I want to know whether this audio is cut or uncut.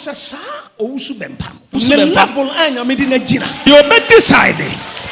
cut